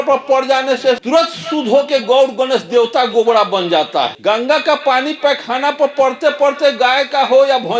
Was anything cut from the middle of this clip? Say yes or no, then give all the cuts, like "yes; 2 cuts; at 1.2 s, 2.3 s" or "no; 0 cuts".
yes; 2 cuts; at 1.0 s, 4.1 s